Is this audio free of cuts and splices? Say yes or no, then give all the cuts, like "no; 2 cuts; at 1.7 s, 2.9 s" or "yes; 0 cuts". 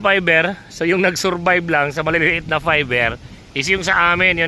yes; 0 cuts